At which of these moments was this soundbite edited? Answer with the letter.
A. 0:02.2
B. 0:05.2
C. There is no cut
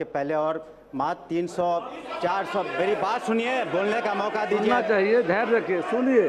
C